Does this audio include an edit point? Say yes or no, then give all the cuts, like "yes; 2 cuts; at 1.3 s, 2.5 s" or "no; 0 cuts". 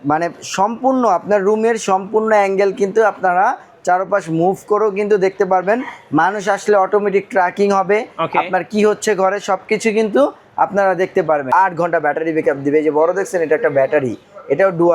yes; 1 cut; at 11.4 s